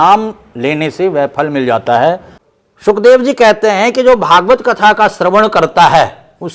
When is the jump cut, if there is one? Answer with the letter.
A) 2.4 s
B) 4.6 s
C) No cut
A